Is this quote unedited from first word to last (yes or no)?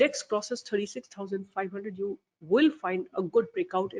yes